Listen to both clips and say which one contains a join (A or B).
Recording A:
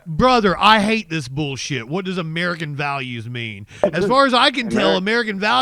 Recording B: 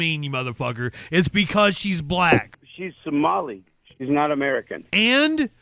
B